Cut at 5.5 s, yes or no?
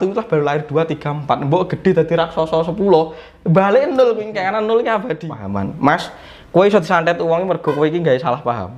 yes